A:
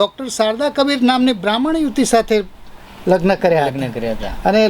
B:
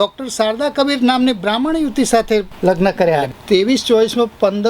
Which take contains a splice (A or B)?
B